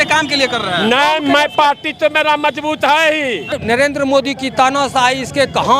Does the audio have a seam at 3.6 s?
yes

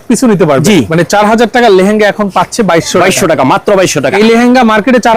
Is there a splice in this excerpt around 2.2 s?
no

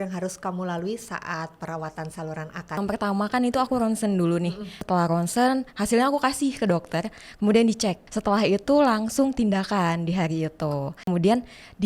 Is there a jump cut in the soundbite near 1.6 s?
no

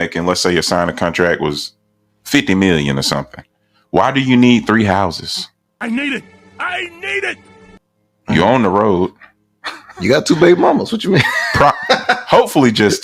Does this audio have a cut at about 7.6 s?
no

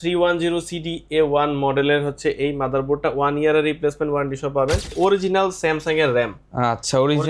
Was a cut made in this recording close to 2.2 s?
no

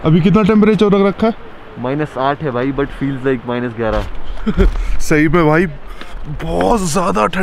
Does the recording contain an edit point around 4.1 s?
no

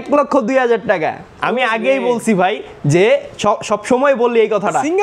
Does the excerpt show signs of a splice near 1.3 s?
no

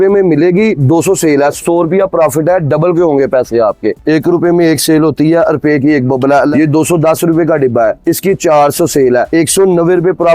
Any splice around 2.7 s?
no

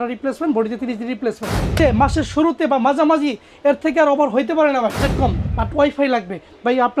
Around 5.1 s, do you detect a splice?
yes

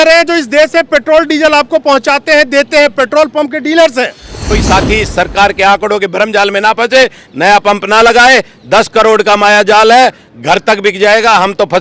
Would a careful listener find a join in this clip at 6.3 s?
no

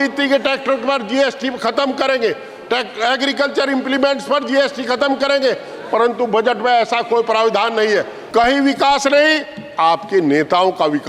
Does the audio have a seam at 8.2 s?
yes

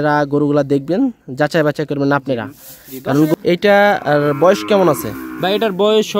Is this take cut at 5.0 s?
no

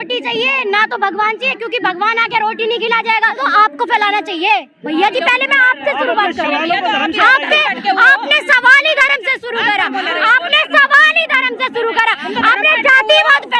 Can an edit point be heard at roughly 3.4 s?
yes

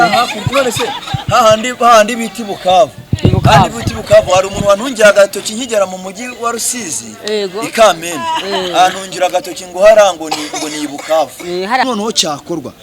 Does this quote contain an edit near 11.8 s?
yes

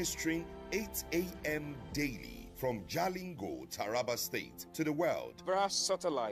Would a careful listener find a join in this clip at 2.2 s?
no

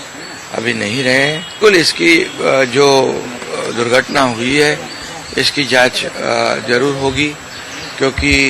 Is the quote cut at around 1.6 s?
yes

